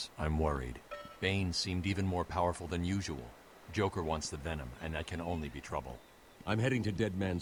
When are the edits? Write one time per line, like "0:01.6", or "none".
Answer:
none